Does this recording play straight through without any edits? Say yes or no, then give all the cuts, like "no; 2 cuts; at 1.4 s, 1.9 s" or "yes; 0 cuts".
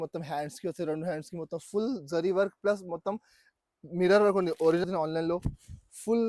no; 1 cut; at 4.8 s